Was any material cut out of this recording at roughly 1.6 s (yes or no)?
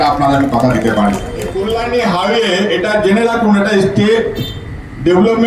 yes